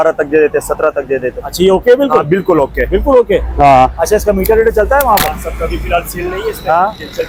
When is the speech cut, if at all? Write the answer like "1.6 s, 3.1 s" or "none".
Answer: none